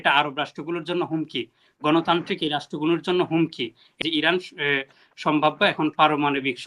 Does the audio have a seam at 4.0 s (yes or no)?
yes